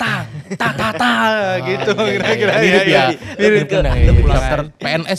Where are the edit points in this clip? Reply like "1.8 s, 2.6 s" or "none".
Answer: 4.2 s